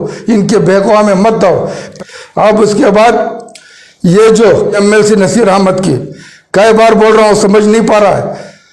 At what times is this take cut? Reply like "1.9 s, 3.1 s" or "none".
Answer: 1.9 s, 4.8 s